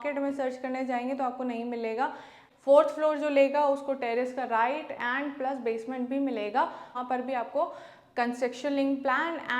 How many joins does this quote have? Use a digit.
2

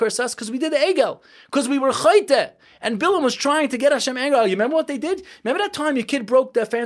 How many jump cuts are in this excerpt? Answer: 0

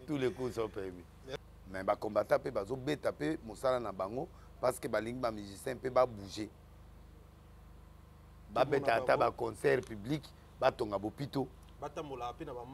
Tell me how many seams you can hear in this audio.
1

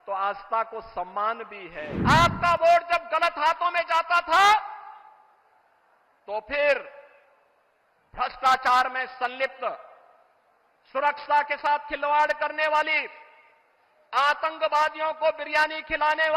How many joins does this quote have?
1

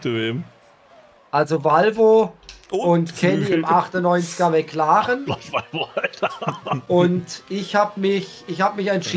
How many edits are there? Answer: 0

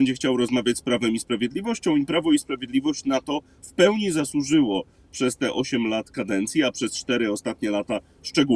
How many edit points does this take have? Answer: 0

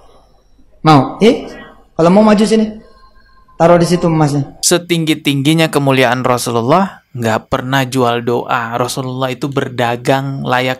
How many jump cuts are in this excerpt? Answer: 1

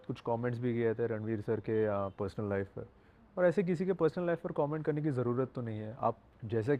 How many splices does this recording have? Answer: 0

